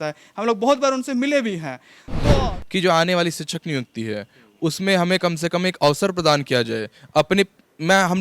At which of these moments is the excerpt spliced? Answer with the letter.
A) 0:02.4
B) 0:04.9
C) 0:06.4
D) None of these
A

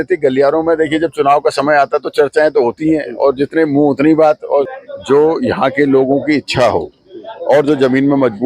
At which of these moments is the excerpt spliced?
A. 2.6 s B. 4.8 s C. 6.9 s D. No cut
B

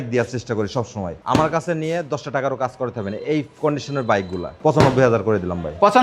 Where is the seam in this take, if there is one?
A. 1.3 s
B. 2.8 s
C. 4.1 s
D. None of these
D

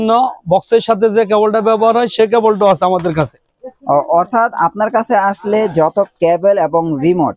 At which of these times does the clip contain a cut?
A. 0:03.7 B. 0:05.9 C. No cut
C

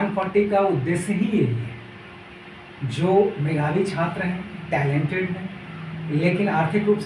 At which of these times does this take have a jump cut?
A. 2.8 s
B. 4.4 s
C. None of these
C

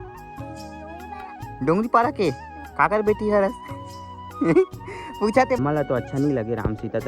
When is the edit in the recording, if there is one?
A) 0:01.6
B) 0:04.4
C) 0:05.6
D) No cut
C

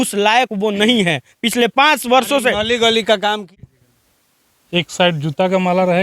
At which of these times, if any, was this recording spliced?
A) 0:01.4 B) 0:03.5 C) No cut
B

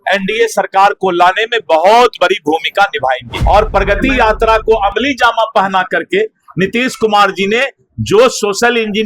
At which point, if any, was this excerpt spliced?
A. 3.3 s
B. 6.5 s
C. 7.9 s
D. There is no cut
A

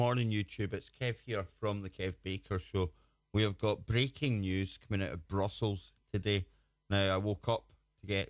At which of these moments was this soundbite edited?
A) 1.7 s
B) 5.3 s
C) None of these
C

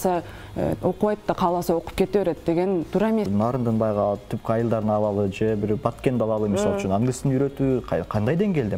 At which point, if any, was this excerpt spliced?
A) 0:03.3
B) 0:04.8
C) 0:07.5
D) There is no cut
A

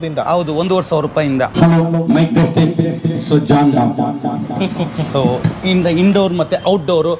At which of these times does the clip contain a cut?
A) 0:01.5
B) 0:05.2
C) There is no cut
A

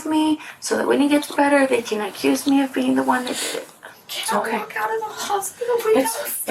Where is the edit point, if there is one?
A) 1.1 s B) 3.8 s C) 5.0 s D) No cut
B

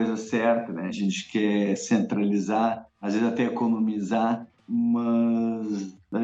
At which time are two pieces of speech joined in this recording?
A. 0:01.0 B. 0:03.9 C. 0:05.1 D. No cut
A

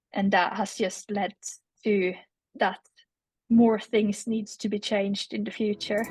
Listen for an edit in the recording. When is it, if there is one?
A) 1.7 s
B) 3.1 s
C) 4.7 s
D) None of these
D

